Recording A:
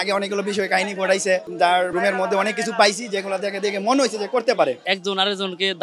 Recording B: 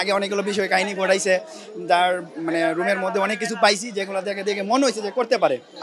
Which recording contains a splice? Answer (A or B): A